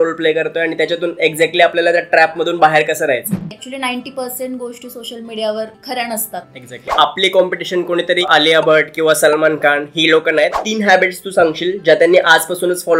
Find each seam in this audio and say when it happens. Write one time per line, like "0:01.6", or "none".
0:03.6
0:05.8
0:06.9
0:08.2
0:10.6